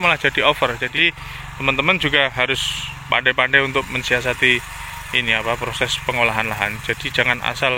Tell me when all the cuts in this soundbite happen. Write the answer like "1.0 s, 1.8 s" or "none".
0.9 s